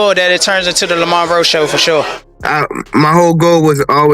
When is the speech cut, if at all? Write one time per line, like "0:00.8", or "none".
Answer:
0:02.2